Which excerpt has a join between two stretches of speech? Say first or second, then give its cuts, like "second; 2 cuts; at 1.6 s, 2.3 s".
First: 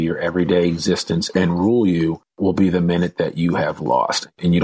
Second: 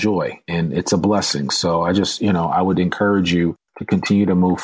first; 3 cuts; at 1.3 s, 2.3 s, 3.9 s